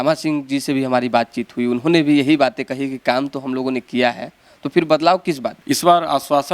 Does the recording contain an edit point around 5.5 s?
yes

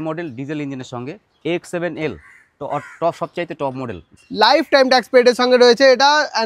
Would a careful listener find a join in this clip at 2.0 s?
no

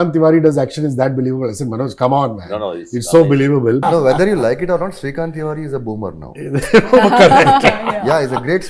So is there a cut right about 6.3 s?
no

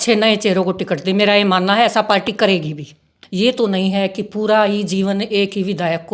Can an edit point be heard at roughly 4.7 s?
no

